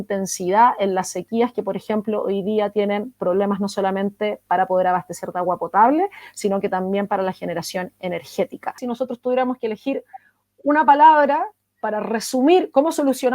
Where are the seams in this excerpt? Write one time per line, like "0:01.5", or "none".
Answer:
0:08.8